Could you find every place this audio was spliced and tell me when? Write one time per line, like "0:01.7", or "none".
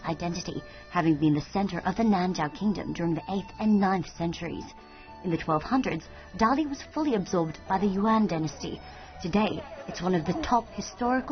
0:05.6